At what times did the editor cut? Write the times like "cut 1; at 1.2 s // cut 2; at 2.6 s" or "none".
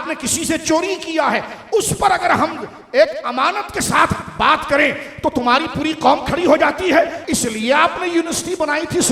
cut 1; at 7.2 s